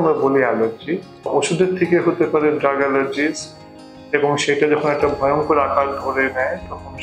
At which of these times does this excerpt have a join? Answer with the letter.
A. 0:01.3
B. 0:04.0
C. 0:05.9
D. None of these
A